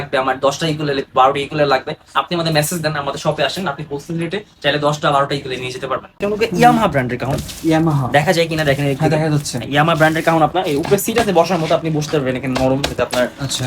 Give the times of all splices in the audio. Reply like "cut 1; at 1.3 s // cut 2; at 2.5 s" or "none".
cut 1; at 6.2 s